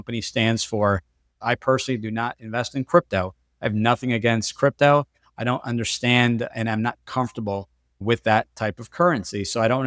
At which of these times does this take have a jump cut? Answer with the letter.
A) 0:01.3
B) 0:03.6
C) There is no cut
A